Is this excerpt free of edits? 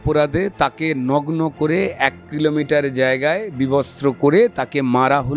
yes; 0 cuts

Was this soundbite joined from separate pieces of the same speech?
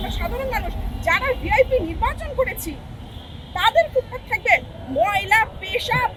no; 0 cuts

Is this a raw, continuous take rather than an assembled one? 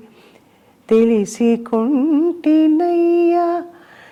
yes; 0 cuts

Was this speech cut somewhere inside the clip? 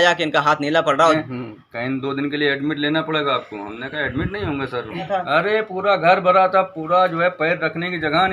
yes; 2 cuts; at 1.1 s, 5.1 s

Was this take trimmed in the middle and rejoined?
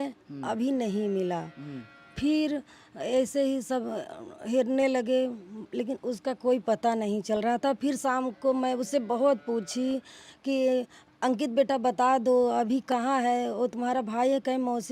no; 0 cuts

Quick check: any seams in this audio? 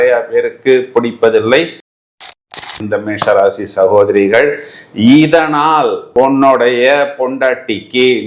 yes; 1 cut; at 2.3 s

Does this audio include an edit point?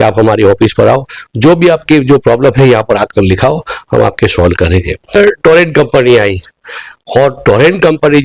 yes; 1 cut; at 5.1 s

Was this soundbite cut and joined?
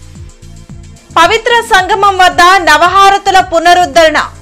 yes; 1 cut; at 0.9 s

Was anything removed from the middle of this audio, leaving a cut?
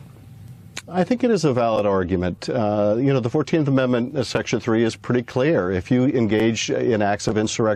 no; 0 cuts

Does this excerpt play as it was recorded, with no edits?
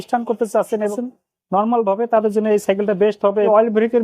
no; 2 cuts; at 0.9 s, 3.3 s

